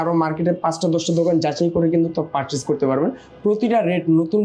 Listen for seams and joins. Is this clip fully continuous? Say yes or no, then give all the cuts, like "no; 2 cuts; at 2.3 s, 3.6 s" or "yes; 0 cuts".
yes; 0 cuts